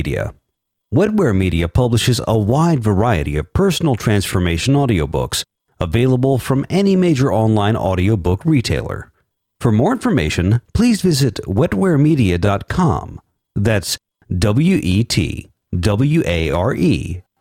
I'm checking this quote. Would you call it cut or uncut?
uncut